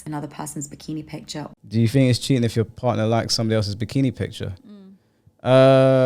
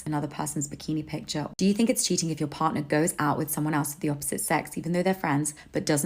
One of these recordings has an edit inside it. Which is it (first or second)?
second